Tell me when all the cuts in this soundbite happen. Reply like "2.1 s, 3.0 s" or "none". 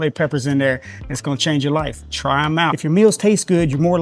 2.8 s